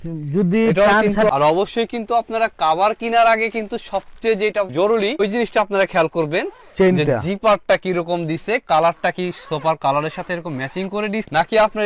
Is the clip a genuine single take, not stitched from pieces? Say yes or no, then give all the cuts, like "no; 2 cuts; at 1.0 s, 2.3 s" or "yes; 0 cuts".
no; 1 cut; at 1.3 s